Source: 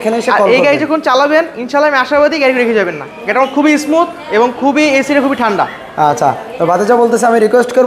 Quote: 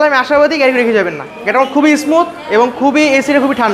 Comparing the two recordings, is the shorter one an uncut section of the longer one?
yes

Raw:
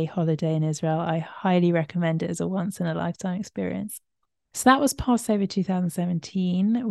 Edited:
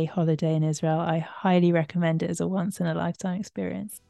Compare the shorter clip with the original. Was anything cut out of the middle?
no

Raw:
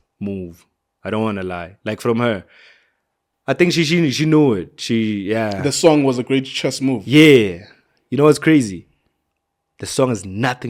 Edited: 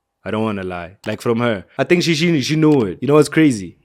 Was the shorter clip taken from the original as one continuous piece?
no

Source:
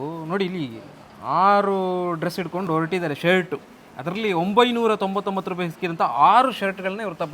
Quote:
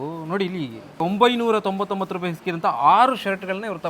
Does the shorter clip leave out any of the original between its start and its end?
yes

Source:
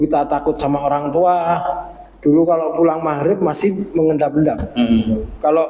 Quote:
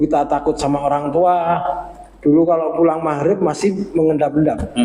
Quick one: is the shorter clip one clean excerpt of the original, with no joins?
yes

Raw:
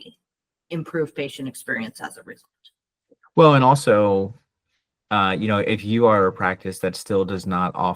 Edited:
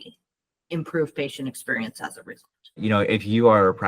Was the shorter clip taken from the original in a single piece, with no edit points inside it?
no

